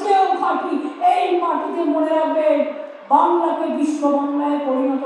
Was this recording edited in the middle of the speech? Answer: no; 0 cuts

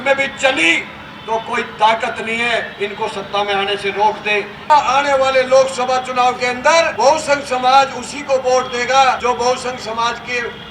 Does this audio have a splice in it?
yes; 3 cuts; at 4.6 s, 6.9 s, 9.2 s

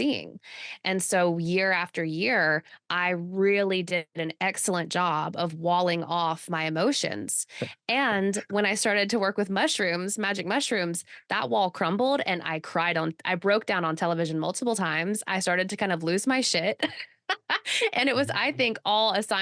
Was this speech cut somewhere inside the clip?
no; 0 cuts

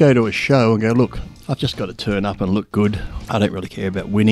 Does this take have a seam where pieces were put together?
yes; 2 cuts; at 1.3 s, 3.1 s

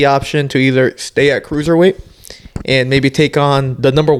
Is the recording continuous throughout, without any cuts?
yes; 0 cuts

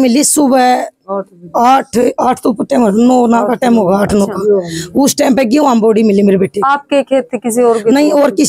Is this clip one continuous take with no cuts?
yes; 0 cuts

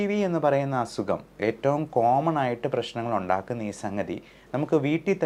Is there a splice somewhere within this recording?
no; 0 cuts

